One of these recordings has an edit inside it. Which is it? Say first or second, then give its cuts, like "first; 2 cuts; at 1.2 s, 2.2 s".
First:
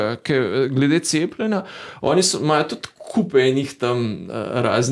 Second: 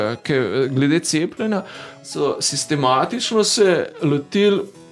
second; 1 cut; at 2.0 s